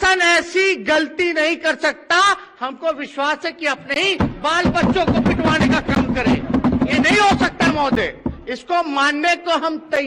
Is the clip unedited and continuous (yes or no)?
yes